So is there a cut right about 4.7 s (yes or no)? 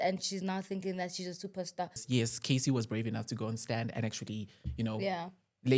no